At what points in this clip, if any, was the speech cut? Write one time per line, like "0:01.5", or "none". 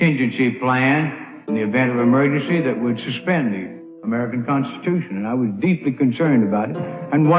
0:05.2